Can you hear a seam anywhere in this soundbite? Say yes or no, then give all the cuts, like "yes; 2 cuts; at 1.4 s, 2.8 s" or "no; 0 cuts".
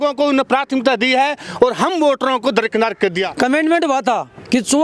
yes; 1 cut; at 3.3 s